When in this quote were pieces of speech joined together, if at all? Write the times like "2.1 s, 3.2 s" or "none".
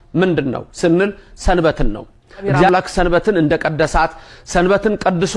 2.7 s